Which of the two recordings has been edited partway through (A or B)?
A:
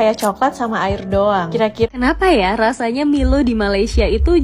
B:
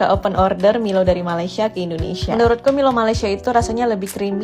A